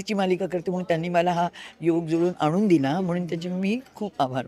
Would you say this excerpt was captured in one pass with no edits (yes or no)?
yes